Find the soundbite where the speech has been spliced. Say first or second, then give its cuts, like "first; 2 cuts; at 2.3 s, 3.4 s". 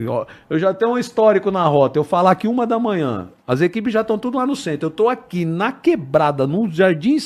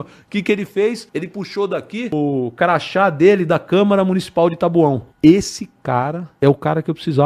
second; 4 cuts; at 1.0 s, 2.1 s, 5.1 s, 6.2 s